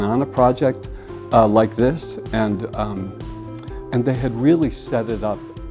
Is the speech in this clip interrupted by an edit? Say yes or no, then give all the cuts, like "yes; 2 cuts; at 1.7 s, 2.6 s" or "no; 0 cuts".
no; 0 cuts